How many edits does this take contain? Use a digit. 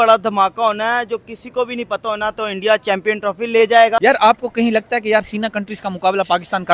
1